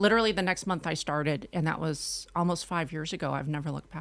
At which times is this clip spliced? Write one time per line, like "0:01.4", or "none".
none